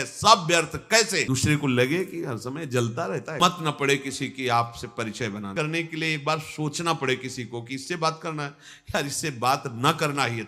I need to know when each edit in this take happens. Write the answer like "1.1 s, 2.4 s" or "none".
1.2 s, 3.4 s, 5.5 s